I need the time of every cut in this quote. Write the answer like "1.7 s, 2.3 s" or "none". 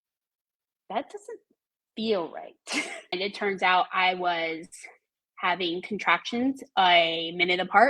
3.2 s